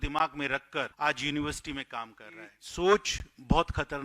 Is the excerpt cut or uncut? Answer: cut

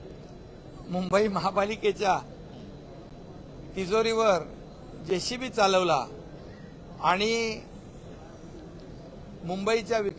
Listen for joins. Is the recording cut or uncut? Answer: uncut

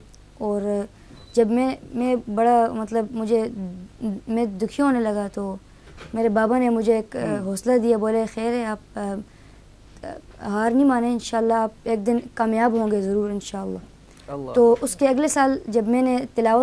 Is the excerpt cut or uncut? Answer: uncut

